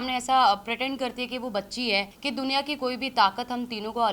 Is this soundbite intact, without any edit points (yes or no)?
no